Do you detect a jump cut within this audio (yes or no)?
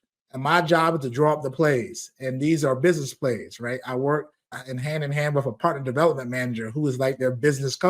yes